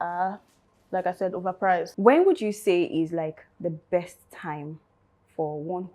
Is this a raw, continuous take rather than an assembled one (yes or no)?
no